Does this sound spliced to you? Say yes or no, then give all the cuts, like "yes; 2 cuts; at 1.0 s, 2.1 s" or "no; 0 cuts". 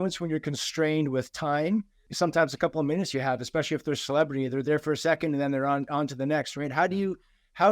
yes; 1 cut; at 2.0 s